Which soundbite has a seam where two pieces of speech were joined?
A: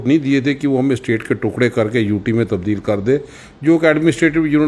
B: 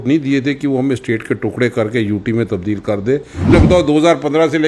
B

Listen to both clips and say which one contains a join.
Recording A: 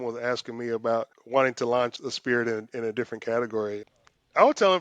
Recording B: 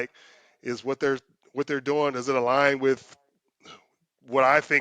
A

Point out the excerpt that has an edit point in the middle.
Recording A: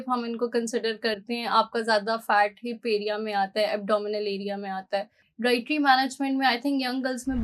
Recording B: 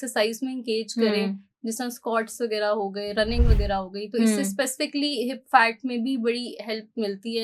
A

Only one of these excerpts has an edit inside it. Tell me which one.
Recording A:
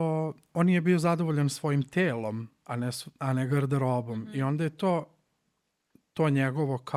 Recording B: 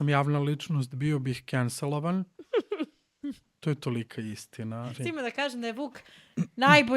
B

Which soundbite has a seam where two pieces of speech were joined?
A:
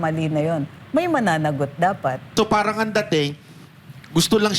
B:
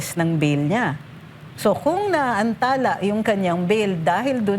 A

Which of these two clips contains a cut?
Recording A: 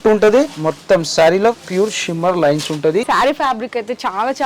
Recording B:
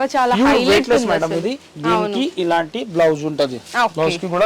A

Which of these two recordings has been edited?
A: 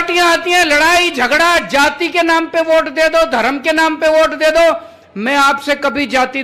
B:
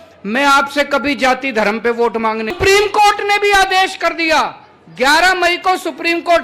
B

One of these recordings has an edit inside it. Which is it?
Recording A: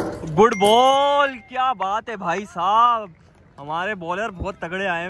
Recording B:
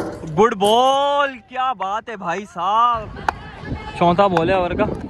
B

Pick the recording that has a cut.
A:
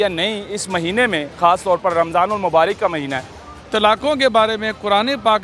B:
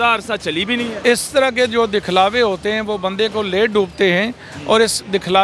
A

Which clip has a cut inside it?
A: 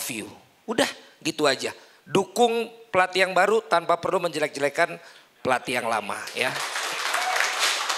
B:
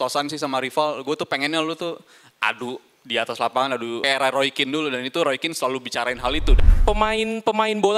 B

